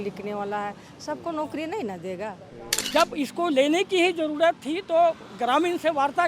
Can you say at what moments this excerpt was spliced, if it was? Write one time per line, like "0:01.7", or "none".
0:02.8